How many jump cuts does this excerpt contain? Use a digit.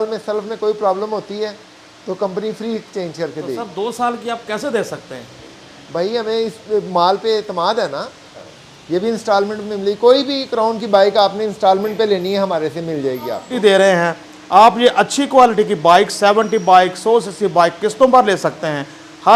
2